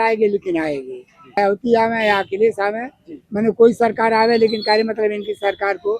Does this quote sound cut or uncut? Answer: cut